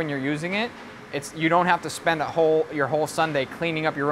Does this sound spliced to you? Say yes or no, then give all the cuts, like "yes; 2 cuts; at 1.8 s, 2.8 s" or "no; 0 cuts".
no; 0 cuts